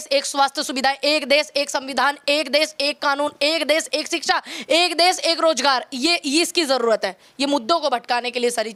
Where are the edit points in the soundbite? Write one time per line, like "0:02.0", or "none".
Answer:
none